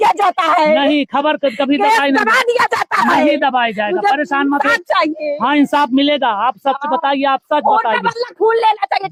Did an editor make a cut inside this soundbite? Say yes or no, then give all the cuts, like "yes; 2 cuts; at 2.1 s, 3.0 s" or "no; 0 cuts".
no; 0 cuts